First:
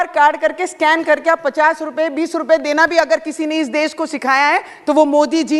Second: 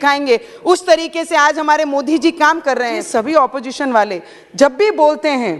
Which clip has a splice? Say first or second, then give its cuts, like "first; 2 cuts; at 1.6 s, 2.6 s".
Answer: second; 1 cut; at 3.0 s